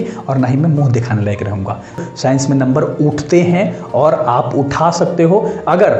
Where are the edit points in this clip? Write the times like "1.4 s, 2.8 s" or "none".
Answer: 2.0 s